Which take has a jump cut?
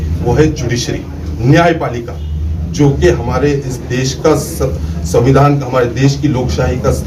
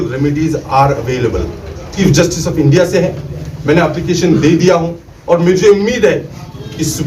second; 1 cut; at 1.9 s

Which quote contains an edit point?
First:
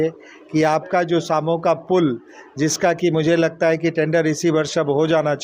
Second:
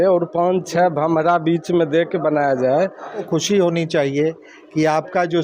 second; 1 cut; at 3.3 s

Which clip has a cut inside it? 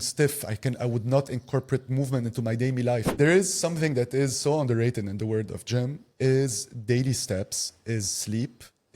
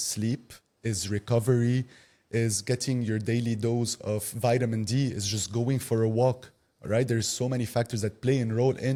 first; 1 cut; at 3.1 s

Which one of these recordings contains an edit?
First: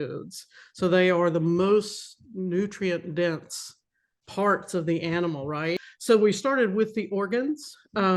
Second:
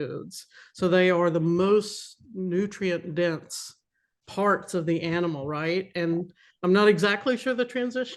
first; 1 cut; at 5.8 s

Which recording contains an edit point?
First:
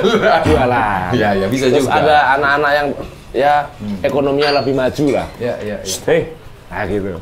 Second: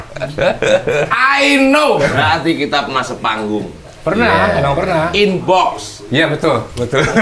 second; 1 cut; at 2.1 s

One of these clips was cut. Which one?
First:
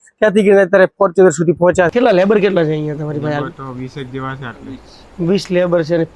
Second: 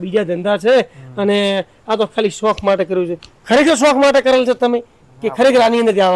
first; 1 cut; at 1.9 s

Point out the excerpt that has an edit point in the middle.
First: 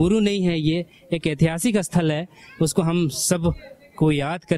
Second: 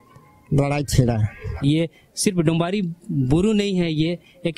second; 1 cut; at 1.6 s

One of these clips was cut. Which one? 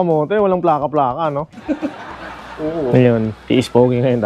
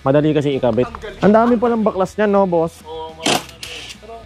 second; 2 cuts; at 1.0 s, 2.8 s

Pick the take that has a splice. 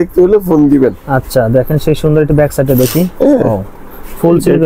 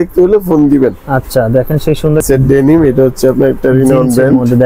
second; 1 cut; at 2.2 s

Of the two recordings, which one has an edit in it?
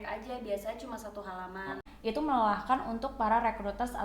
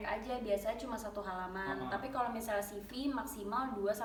first; 1 cut; at 1.9 s

